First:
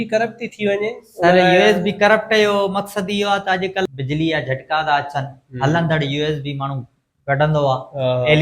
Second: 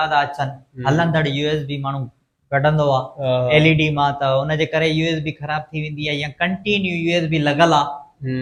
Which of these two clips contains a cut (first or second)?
first